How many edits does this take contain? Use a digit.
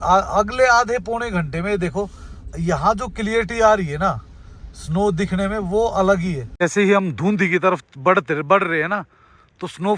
1